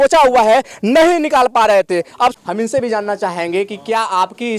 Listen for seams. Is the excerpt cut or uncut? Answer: cut